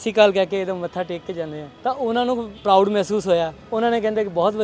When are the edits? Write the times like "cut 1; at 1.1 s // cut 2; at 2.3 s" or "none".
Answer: cut 1; at 1.6 s // cut 2; at 2.5 s // cut 3; at 3.6 s